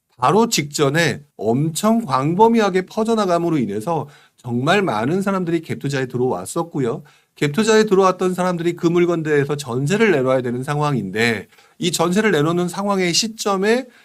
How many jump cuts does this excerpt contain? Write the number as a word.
two